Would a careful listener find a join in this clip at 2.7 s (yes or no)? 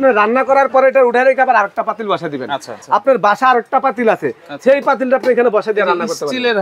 yes